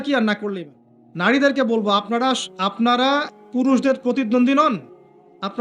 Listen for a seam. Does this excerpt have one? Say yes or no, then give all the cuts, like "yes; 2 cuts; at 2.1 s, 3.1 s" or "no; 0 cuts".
yes; 1 cut; at 1.3 s